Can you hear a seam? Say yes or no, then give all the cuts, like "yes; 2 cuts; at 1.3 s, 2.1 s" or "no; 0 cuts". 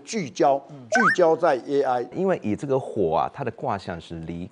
yes; 1 cut; at 2.2 s